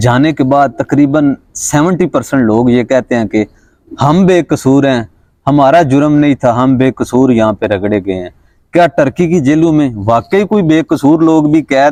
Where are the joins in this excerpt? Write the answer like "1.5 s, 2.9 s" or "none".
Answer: none